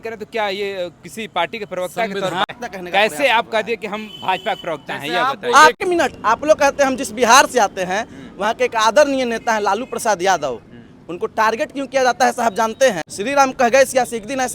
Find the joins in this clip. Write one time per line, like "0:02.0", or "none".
0:02.5
0:05.8
0:13.1